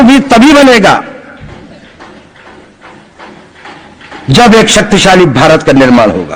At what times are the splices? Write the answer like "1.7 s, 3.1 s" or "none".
none